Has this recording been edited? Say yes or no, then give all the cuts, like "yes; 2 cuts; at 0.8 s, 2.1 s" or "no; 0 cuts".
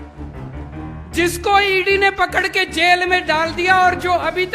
yes; 1 cut; at 1.1 s